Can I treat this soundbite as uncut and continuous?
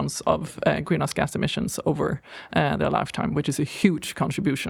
yes; 0 cuts

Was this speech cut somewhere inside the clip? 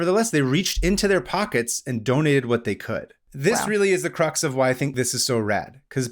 yes; 2 cuts; at 3.2 s, 4.9 s

